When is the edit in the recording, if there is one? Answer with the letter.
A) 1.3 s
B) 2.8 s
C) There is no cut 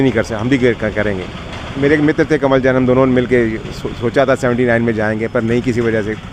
C